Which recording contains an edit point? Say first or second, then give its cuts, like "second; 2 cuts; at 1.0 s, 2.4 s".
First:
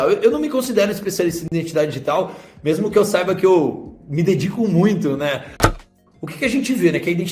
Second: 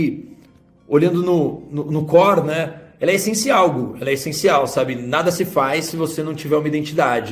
first; 1 cut; at 5.6 s